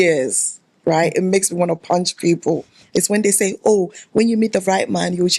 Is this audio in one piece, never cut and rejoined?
yes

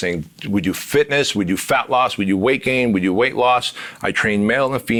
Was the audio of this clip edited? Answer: no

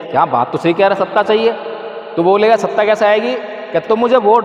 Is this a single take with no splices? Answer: yes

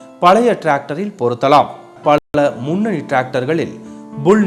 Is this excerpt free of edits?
no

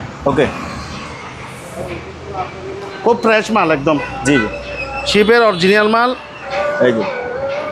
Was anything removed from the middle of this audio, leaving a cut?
yes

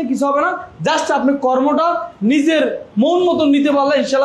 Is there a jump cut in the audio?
no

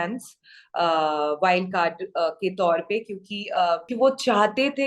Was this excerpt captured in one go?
no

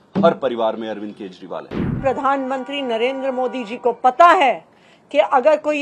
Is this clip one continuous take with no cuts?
no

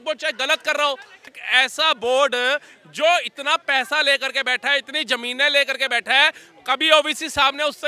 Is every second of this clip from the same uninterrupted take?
no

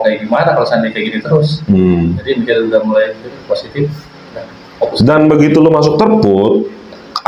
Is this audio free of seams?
yes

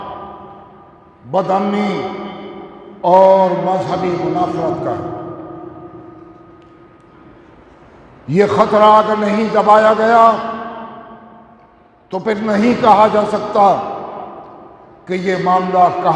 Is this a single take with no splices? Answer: yes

